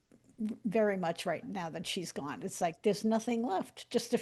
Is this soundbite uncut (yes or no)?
no